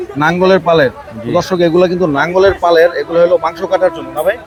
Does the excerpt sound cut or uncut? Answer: uncut